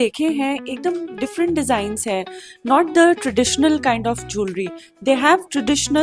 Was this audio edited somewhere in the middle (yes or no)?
no